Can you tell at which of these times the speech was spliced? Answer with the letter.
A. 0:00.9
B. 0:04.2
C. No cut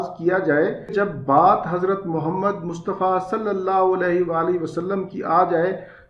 A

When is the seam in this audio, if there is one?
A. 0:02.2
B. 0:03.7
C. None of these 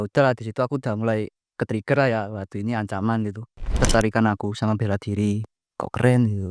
B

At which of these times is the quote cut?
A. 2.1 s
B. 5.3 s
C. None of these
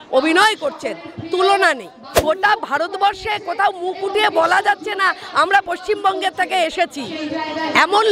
A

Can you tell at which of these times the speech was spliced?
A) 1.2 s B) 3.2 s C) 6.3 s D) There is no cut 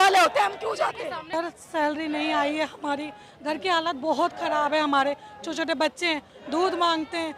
A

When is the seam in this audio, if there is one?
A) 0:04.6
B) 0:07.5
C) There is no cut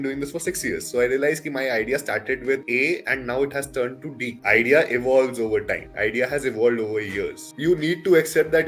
B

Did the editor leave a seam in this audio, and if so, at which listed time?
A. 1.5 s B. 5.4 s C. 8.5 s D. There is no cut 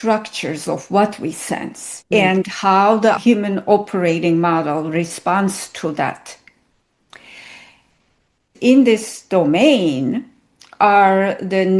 C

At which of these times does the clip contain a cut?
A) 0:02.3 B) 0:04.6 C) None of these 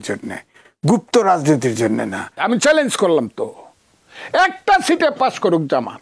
A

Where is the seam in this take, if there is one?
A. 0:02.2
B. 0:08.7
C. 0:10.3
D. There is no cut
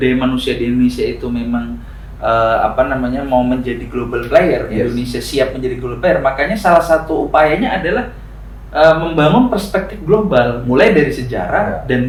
D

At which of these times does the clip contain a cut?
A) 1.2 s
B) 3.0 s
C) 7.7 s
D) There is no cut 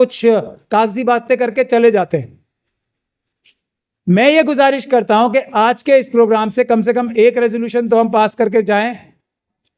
D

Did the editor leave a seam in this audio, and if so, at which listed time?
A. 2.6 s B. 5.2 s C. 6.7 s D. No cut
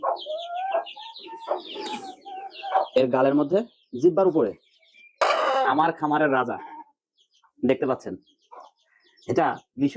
B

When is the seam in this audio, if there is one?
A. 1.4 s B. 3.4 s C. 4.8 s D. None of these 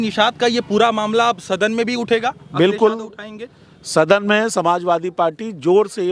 D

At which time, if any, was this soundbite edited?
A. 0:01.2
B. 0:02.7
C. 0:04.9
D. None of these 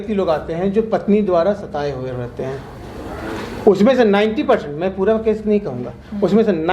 D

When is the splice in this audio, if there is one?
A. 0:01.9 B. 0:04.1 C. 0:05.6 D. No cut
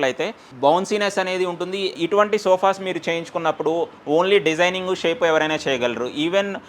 A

